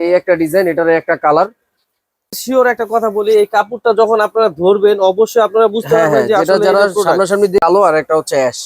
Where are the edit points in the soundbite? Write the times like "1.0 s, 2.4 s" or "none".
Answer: 2.4 s, 7.6 s